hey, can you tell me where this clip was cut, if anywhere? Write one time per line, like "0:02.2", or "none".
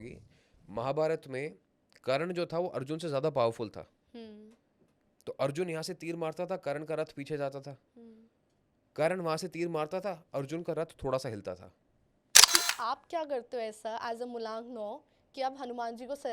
0:12.4